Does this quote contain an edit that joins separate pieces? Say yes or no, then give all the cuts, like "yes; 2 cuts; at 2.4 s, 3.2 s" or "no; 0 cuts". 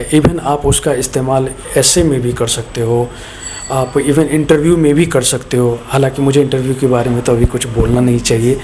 no; 0 cuts